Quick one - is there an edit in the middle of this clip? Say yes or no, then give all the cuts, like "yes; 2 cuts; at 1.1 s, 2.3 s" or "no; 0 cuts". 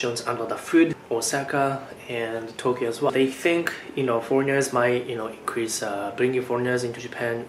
yes; 2 cuts; at 1.0 s, 3.1 s